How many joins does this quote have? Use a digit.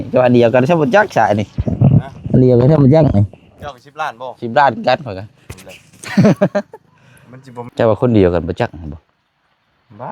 1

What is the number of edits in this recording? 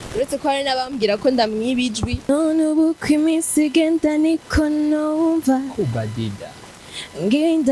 1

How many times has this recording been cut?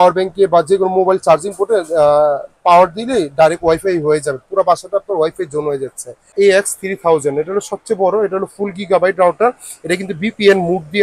1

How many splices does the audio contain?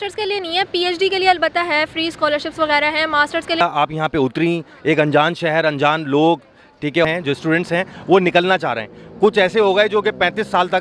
2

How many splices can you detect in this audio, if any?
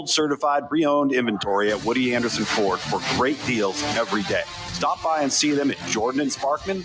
0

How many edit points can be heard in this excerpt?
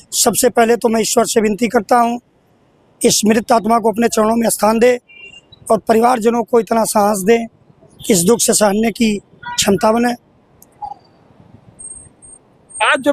0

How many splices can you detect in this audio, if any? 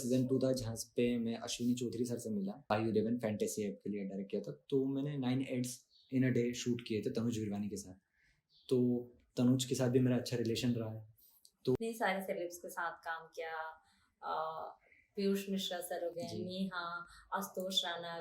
2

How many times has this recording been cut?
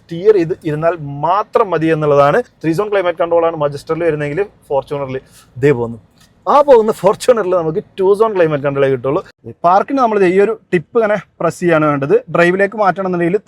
2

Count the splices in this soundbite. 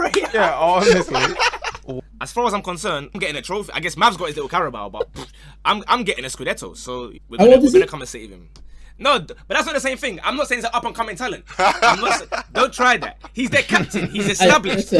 3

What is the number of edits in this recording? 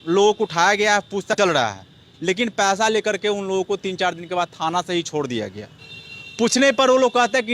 1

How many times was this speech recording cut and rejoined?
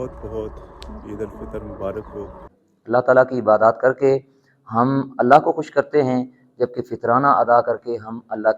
1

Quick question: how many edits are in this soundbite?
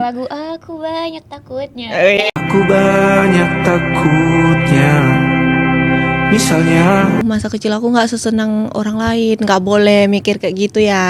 2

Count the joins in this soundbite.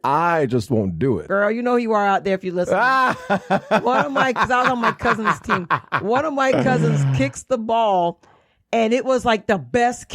1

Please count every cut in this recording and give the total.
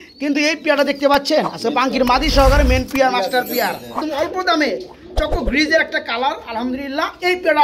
1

